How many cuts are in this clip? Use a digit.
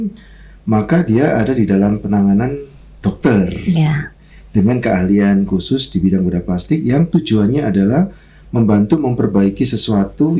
0